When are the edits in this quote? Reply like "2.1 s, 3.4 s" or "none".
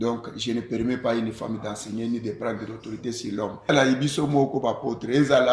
3.7 s